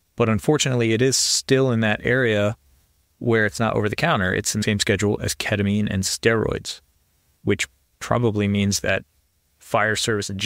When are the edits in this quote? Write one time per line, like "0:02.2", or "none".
0:04.6
0:07.3